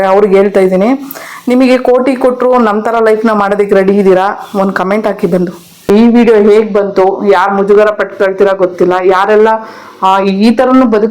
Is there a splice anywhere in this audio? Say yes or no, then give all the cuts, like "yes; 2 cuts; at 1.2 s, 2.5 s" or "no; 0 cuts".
yes; 1 cut; at 5.9 s